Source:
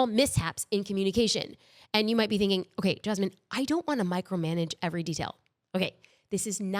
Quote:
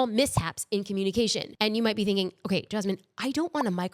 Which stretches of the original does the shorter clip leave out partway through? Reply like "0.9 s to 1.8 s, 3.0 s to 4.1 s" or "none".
1.5 s to 1.8 s